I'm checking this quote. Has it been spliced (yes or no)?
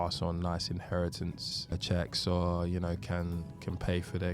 yes